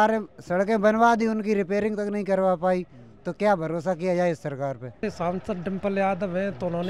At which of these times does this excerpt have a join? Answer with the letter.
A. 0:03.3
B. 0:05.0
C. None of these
B